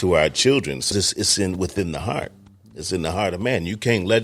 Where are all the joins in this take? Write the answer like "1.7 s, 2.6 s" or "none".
0.9 s